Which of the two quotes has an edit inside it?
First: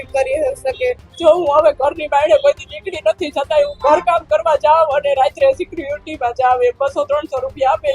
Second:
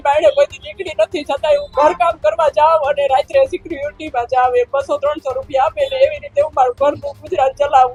first; 1 cut; at 1.1 s

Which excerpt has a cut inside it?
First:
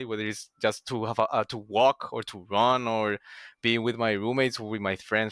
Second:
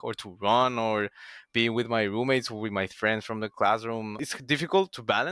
second; 1 cut; at 4.3 s

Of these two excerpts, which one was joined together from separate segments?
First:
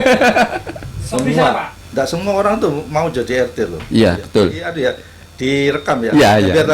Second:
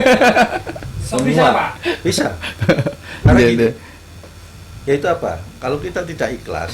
first; 2 cuts; at 1.7 s, 4.7 s

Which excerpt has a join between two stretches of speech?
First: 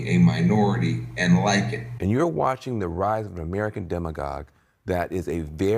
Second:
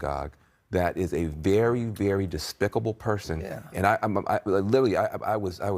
first; 1 cut; at 1.8 s

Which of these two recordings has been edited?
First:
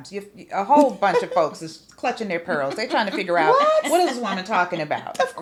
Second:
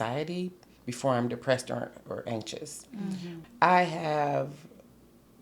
second; 1 cut; at 3.3 s

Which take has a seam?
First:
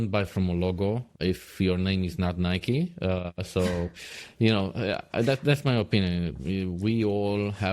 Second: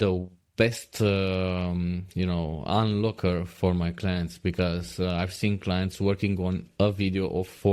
first; 1 cut; at 1.1 s

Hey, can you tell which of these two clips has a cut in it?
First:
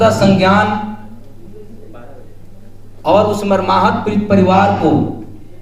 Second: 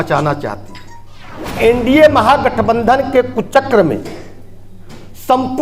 second; 1 cut; at 1.6 s

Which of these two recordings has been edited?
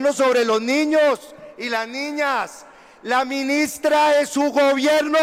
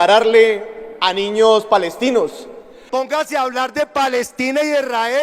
second; 1 cut; at 2.8 s

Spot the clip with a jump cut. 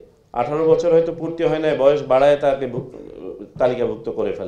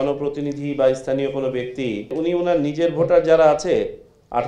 second; 1 cut; at 2.1 s

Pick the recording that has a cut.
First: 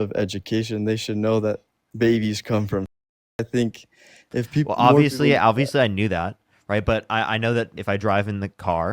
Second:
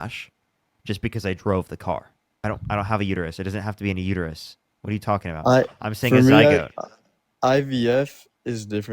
second; 1 cut; at 2.4 s

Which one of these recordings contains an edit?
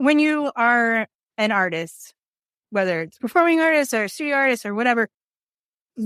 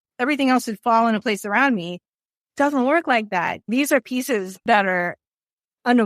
second; 2 cuts; at 3.7 s, 4.6 s

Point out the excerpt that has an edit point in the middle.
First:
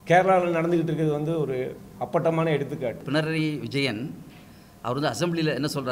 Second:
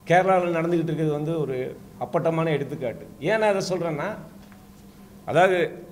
first; 1 cut; at 3.0 s

